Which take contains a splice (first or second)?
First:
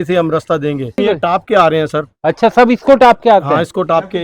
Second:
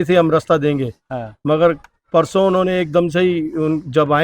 first